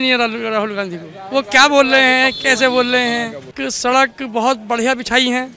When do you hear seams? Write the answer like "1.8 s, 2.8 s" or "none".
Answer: 3.5 s